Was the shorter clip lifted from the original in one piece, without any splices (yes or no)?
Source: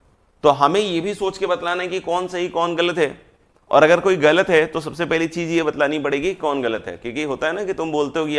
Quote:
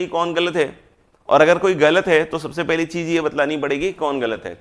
yes